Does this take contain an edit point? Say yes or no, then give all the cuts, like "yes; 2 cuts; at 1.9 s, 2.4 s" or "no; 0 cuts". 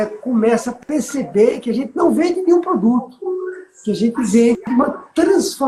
no; 0 cuts